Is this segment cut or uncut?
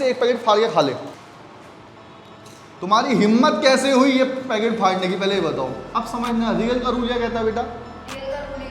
cut